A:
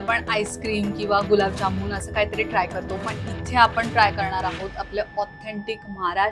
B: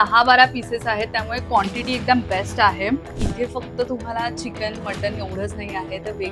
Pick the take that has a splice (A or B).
B